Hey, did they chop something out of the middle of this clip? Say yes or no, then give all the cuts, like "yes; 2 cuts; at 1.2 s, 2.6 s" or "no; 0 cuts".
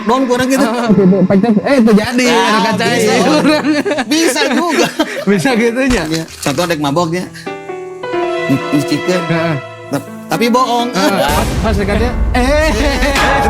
yes; 1 cut; at 6.3 s